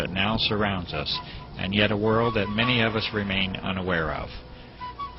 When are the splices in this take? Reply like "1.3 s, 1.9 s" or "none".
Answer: 1.6 s

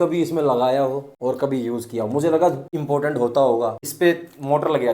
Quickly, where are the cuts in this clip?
1.1 s, 2.7 s, 3.8 s

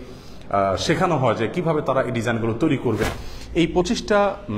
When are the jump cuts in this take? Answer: 3.0 s

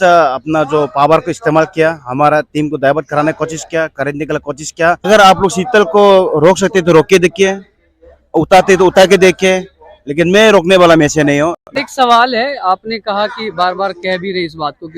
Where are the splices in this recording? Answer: 5.1 s, 11.6 s

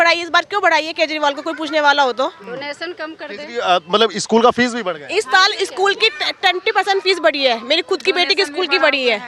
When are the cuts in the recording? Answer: none

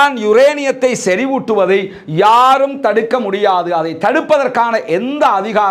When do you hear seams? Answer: none

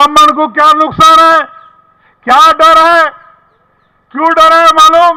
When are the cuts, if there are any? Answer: none

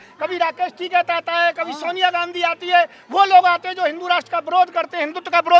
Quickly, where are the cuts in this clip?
none

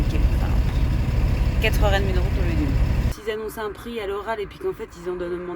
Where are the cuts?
3.1 s

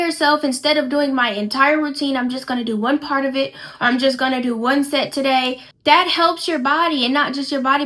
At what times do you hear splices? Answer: 5.6 s

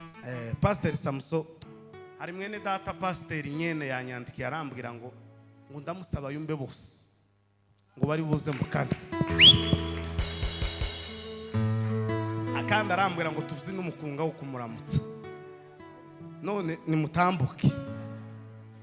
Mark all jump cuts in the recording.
1.5 s

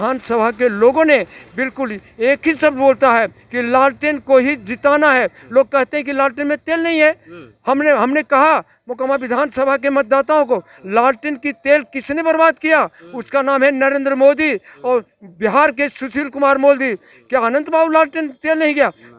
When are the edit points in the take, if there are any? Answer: none

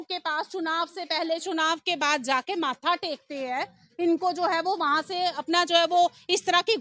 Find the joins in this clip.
none

